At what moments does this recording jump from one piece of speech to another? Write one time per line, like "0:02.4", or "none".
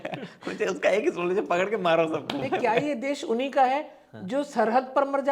0:02.6